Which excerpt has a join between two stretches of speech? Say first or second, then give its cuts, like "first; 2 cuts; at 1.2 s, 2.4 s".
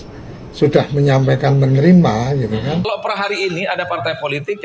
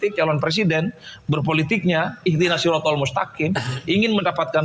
first; 1 cut; at 2.9 s